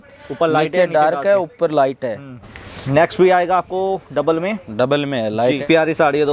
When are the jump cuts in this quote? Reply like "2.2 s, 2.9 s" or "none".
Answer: 2.5 s, 5.6 s

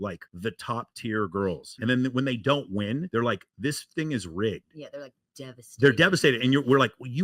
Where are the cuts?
1.8 s

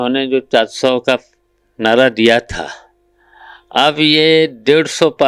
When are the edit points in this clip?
none

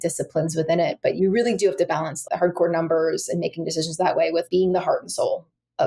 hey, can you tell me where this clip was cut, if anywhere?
1.1 s, 2.2 s, 4.5 s

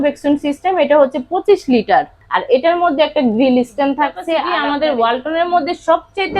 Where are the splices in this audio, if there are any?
2.2 s, 4.5 s

